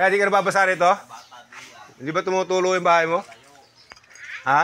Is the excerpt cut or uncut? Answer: uncut